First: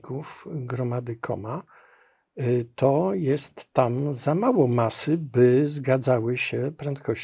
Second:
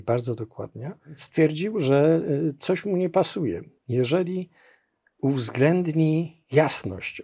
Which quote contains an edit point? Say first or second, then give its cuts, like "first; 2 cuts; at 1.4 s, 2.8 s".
second; 2 cuts; at 1.2 s, 6.4 s